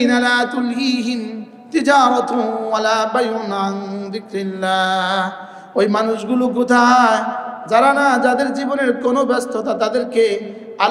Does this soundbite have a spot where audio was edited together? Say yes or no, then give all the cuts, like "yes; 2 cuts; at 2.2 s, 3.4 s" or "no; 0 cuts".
no; 0 cuts